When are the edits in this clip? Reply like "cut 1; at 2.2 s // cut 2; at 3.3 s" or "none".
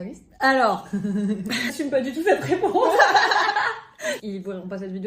cut 1; at 1.8 s // cut 2; at 4.2 s

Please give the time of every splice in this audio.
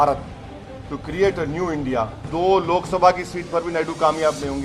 cut 1; at 2.2 s

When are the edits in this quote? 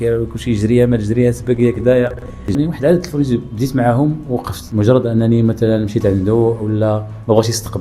cut 1; at 2.5 s // cut 2; at 4.6 s

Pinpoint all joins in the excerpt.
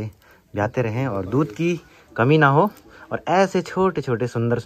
none

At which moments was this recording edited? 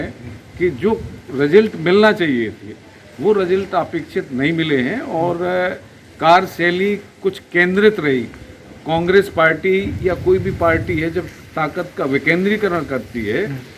none

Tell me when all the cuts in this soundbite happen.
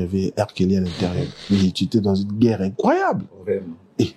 cut 1; at 1.3 s

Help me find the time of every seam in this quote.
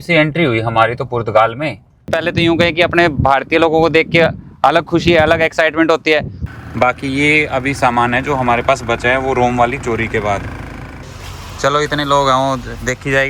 cut 1; at 2.1 s // cut 2; at 6.4 s // cut 3; at 11.2 s

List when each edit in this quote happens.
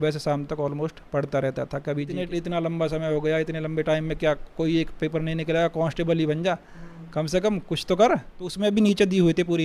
cut 1; at 2.2 s // cut 2; at 8.4 s

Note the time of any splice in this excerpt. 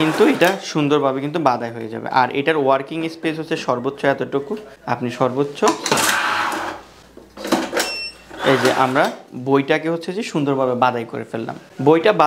none

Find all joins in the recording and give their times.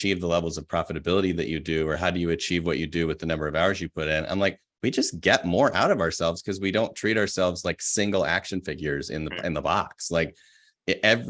none

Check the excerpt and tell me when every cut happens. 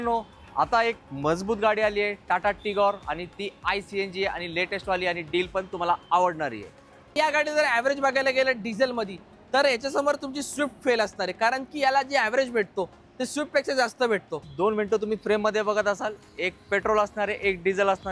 cut 1; at 7.1 s // cut 2; at 14.5 s

